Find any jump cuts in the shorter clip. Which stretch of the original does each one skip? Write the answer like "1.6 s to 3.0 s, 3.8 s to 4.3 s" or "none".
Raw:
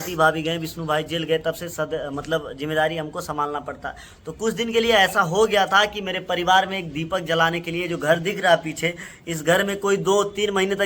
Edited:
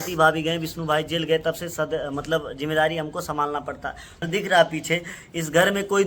4.3 s to 8.2 s